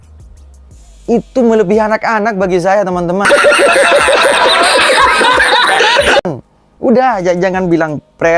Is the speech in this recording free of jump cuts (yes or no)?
yes